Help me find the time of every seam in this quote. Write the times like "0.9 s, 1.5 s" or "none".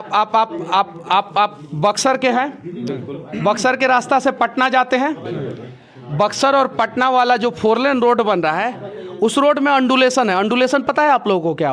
none